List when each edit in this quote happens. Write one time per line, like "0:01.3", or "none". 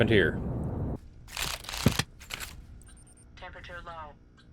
0:01.0

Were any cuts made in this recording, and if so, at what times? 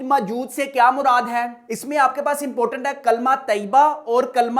0:01.7

